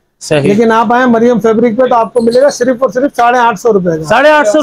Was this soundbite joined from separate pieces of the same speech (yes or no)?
no